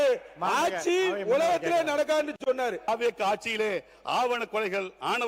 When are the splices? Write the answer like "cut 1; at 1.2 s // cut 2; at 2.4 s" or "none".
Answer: none

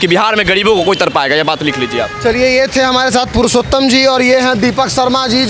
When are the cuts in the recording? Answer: none

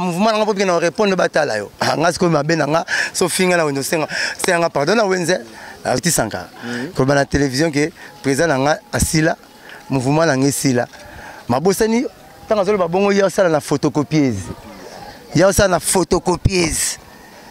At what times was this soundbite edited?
cut 1; at 6.0 s

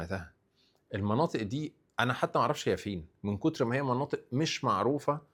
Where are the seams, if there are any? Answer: none

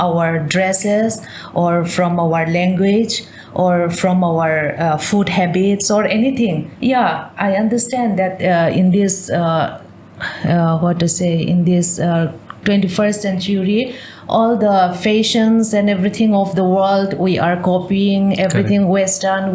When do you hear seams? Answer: cut 1; at 6.7 s

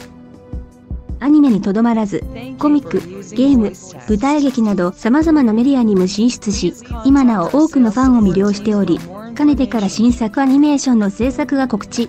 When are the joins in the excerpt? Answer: none

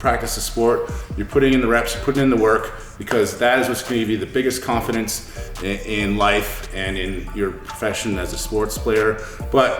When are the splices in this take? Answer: none

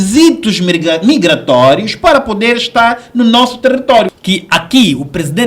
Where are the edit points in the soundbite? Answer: cut 1; at 4.1 s

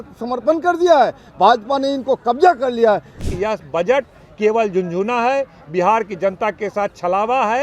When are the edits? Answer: cut 1; at 3.3 s

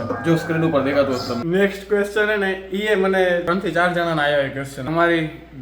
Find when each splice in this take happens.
cut 1; at 1.4 s // cut 2; at 3.5 s // cut 3; at 4.8 s

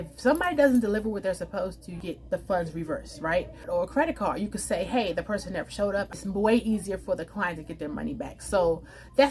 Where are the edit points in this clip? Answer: cut 1; at 2.0 s // cut 2; at 3.6 s // cut 3; at 6.1 s

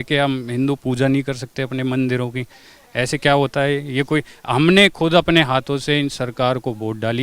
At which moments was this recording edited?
none

